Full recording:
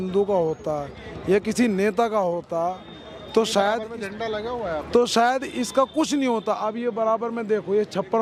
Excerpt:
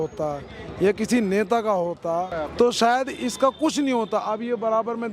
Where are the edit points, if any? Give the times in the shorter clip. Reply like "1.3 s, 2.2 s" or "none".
2.4 s